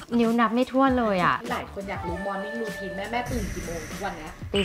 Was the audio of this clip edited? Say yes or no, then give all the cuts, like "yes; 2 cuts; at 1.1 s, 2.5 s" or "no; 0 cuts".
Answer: yes; 1 cut; at 1.5 s